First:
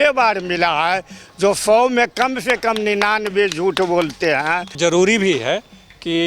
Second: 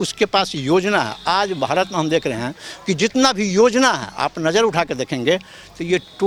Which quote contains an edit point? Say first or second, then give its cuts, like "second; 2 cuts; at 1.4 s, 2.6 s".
first; 1 cut; at 4.8 s